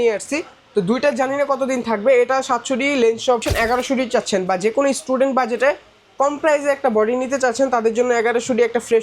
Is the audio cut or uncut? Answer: cut